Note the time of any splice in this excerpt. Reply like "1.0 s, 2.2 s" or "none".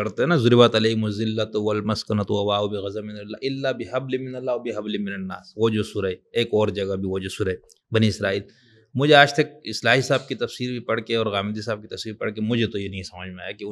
none